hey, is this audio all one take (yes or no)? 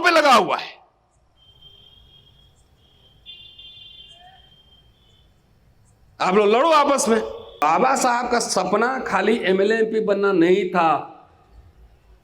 no